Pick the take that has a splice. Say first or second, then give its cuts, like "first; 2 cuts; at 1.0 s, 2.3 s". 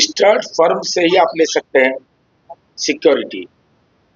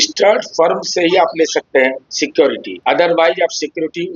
second; 2 cuts; at 2.1 s, 2.7 s